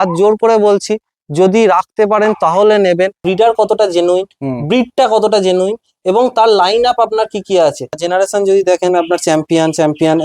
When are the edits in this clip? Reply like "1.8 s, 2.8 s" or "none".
3.2 s, 8.0 s